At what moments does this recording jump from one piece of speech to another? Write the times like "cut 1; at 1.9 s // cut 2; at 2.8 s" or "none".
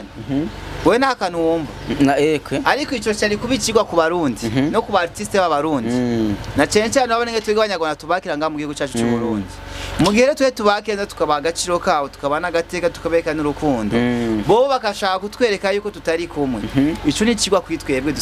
none